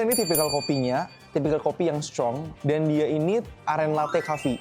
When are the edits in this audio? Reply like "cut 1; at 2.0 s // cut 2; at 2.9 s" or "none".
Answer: cut 1; at 1.2 s // cut 2; at 2.5 s